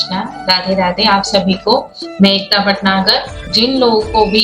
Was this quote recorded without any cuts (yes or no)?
no